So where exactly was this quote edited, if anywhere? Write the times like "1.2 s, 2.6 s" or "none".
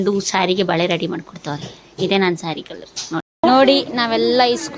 3.3 s